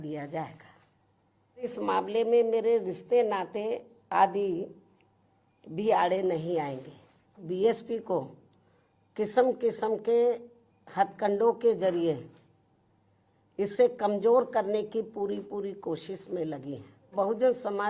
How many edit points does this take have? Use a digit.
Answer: 3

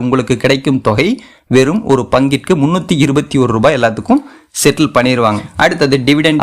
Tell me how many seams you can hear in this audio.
1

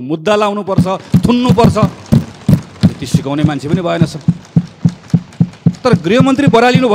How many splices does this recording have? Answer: 0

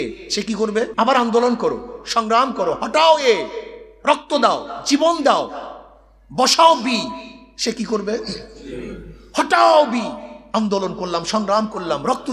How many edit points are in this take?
1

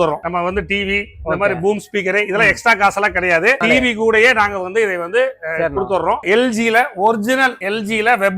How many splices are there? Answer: 2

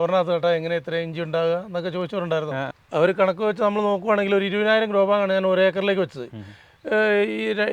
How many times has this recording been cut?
1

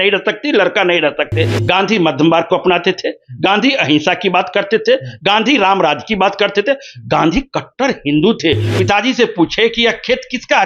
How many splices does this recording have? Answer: 2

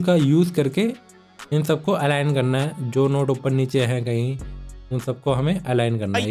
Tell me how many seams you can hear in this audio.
0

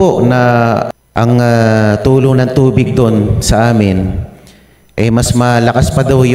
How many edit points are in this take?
1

